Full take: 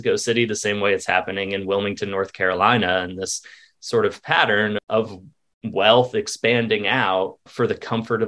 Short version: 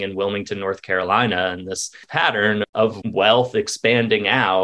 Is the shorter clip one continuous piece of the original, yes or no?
no